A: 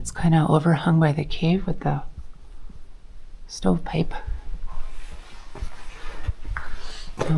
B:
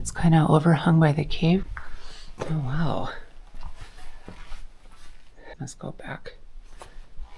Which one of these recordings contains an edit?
B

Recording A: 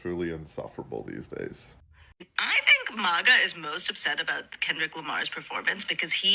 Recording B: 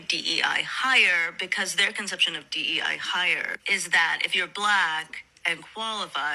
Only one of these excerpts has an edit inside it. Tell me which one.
A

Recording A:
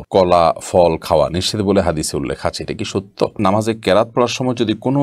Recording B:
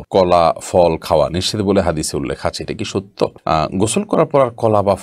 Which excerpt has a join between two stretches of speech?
A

